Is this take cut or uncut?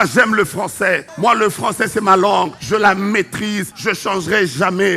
cut